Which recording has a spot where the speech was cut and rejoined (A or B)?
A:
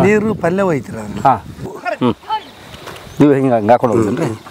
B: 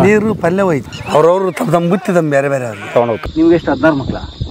B